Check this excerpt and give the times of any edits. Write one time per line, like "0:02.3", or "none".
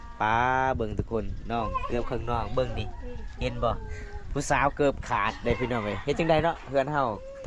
none